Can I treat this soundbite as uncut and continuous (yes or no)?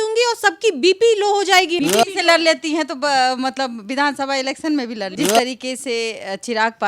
no